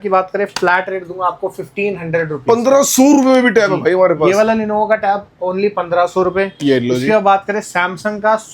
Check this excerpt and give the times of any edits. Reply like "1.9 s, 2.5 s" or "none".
none